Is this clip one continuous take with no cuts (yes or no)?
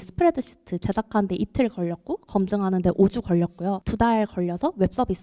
yes